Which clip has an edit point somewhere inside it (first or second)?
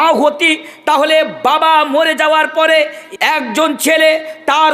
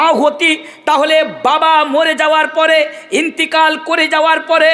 first